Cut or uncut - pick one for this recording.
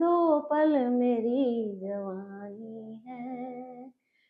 uncut